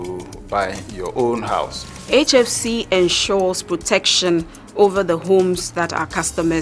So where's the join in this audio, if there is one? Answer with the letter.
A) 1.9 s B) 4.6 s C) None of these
A